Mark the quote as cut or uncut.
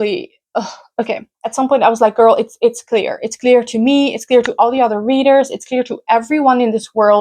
cut